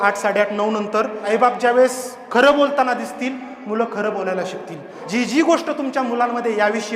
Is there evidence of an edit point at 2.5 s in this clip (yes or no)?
no